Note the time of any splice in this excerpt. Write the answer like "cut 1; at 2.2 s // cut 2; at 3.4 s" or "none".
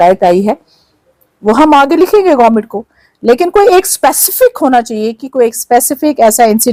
none